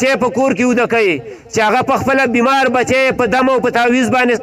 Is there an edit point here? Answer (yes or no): no